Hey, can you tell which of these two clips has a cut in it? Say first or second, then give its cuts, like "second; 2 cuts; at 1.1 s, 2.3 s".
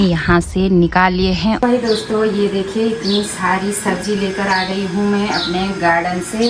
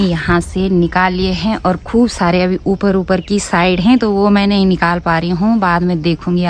first; 1 cut; at 1.6 s